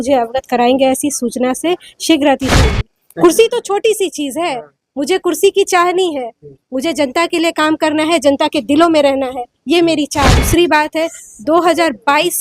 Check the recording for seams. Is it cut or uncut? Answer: cut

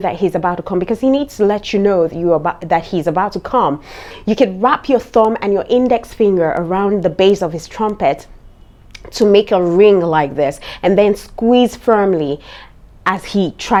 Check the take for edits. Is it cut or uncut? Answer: uncut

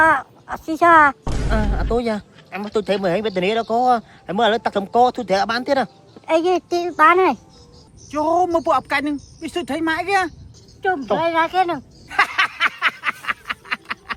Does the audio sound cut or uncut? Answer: cut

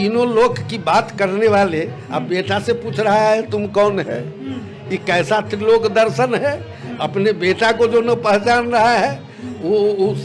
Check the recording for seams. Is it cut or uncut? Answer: uncut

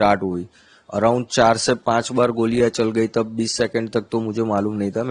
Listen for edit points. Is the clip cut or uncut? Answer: uncut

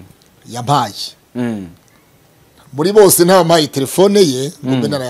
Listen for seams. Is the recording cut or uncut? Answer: uncut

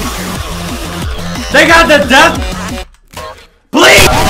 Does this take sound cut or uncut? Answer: uncut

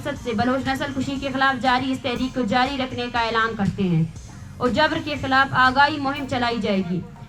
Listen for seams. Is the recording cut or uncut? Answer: cut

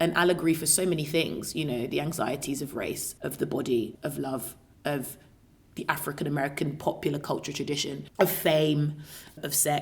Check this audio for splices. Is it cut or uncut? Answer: cut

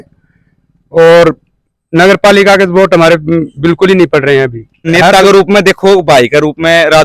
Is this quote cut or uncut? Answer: cut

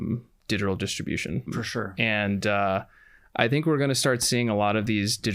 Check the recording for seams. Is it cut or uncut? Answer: cut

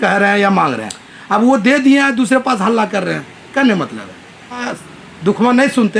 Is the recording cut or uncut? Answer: cut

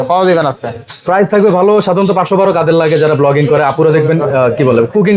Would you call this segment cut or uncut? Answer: uncut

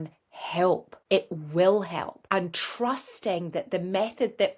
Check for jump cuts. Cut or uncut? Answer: cut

